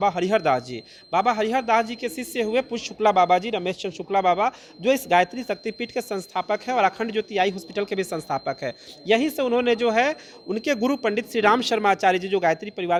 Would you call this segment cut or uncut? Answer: uncut